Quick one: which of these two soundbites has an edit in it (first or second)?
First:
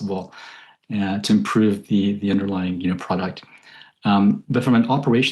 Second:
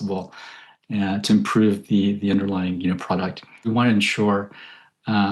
second